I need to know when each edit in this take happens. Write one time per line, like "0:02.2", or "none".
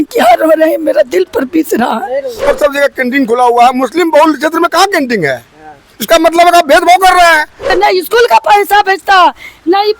0:02.5
0:07.7